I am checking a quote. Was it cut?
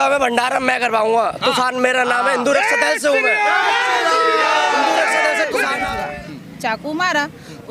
yes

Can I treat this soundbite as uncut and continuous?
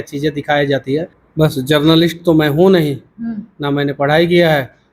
no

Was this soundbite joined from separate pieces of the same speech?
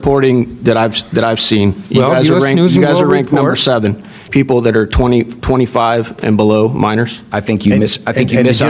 yes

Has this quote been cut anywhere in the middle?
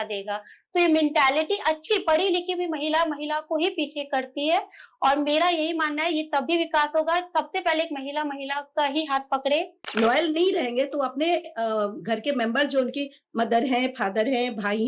yes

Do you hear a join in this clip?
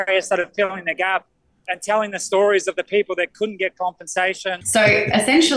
yes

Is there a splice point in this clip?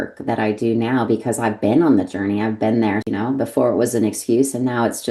yes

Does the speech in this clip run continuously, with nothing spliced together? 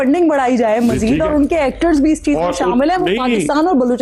yes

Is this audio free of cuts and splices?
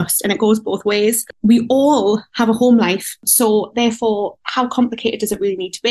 no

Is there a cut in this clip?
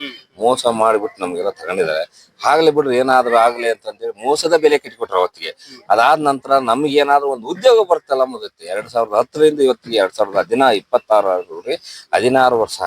no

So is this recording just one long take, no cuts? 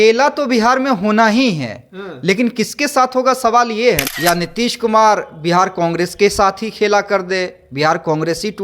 no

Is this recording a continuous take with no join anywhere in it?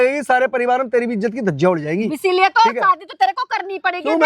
yes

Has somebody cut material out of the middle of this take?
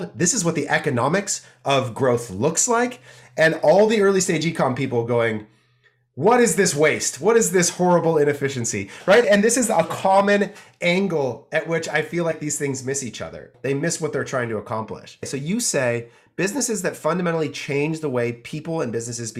yes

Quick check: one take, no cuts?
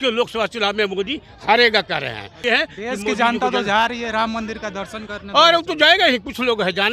no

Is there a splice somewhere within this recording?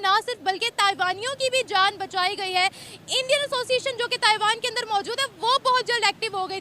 no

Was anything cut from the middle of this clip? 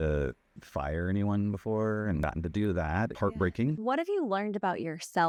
no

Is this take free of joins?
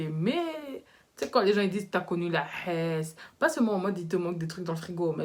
yes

